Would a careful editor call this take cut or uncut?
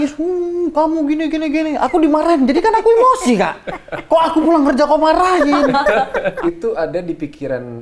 cut